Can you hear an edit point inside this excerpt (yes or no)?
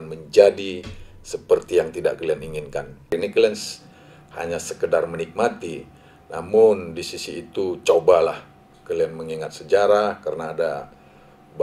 yes